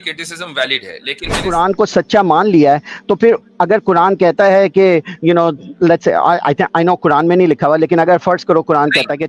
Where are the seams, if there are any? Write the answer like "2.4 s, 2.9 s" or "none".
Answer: 1.5 s